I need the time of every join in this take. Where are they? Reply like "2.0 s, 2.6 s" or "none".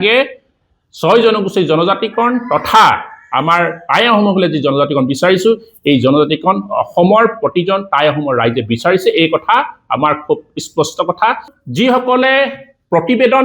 11.5 s